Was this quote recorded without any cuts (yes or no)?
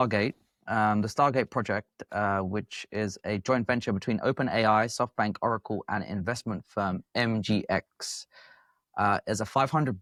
yes